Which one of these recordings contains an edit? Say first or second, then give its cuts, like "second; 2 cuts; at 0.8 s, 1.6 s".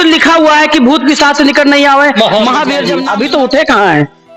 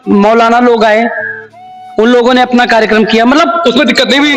first; 1 cut; at 2.9 s